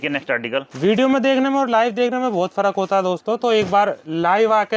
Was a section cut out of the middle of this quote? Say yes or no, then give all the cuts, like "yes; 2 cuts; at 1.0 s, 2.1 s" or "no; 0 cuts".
no; 0 cuts